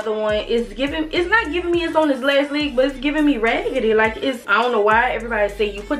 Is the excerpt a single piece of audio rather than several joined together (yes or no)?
no